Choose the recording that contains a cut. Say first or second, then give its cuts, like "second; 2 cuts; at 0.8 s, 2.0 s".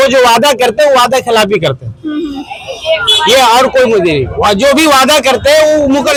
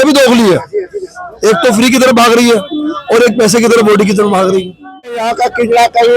second; 1 cut; at 5.2 s